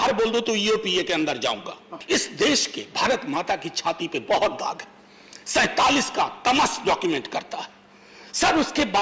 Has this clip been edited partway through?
yes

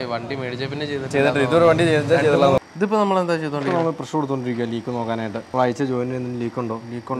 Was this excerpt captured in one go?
no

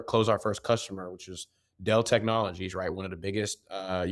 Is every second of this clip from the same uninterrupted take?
yes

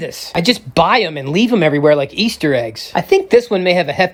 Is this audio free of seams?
yes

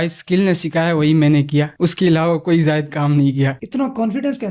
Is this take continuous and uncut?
yes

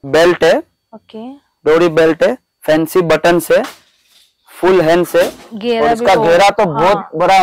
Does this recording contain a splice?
no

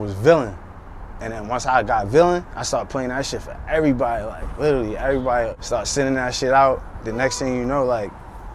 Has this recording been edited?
yes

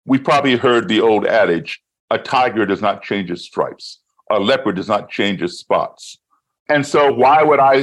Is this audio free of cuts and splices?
no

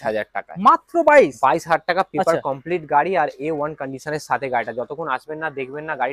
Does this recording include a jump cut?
no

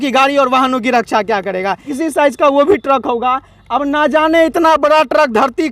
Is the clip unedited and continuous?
no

